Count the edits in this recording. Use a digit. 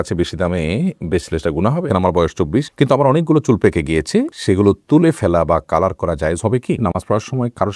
2